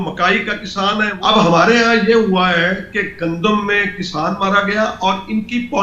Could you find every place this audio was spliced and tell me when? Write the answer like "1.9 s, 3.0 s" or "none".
1.1 s